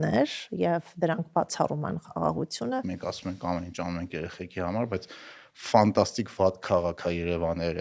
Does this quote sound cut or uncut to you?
cut